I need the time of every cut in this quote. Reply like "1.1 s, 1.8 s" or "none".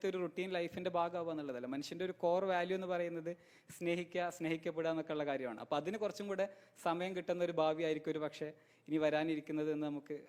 none

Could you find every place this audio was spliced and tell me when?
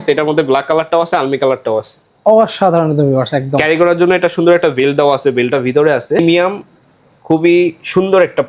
6.2 s

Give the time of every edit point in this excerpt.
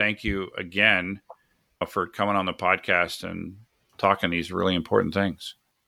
1.8 s

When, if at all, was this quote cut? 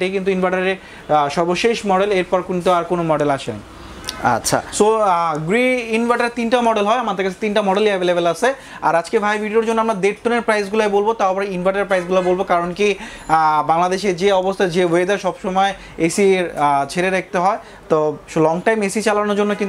none

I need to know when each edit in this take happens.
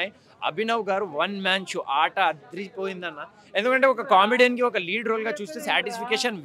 none

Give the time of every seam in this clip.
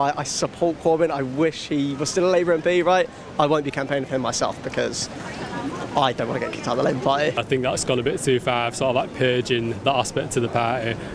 7.4 s

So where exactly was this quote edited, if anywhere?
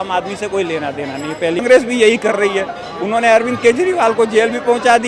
1.6 s

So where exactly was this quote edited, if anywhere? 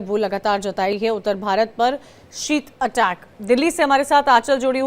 1.0 s

